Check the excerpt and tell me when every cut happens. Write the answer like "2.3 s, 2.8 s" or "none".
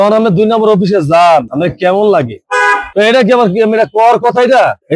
none